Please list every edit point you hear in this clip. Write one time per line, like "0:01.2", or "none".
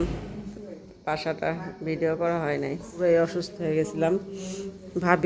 0:02.9